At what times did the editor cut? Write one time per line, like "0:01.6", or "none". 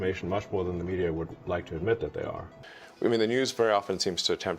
0:02.5